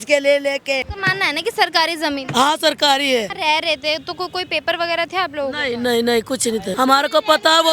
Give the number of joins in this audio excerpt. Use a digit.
3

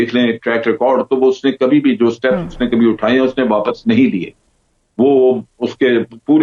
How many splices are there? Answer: 0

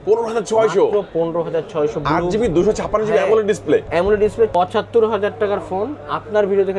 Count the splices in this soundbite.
1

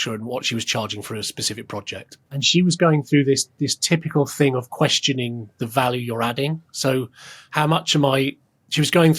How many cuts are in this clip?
1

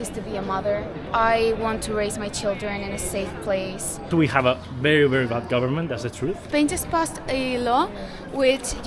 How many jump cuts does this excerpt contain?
3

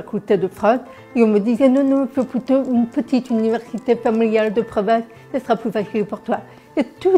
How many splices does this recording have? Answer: 0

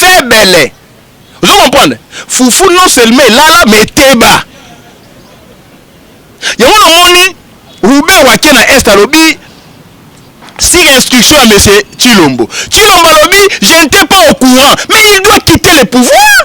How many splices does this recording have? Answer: 0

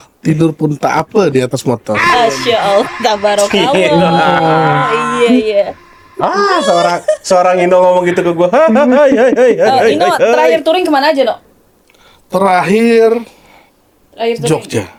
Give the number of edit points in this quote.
0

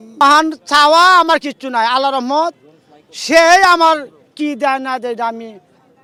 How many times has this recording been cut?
0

